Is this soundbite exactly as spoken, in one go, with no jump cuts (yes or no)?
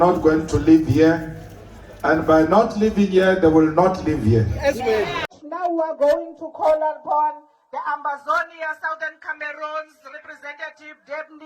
no